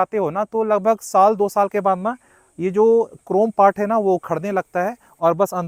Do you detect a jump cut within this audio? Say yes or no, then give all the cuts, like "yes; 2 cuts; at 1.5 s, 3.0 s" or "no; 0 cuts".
no; 0 cuts